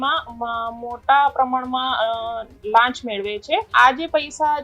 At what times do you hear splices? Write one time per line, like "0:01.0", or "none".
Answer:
0:03.7